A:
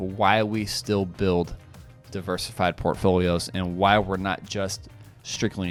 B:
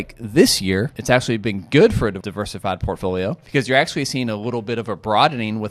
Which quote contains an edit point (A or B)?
B